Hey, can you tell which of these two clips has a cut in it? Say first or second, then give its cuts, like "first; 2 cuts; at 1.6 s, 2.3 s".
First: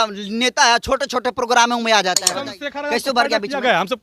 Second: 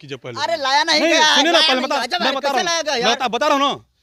first; 1 cut; at 2.3 s